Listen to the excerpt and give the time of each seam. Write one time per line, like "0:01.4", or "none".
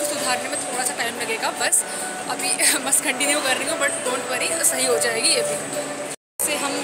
none